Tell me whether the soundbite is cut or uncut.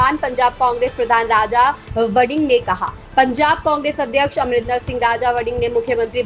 uncut